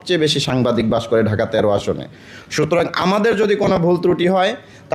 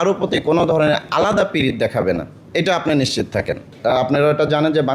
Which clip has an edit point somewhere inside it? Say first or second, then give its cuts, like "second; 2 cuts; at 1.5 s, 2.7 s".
second; 1 cut; at 3.7 s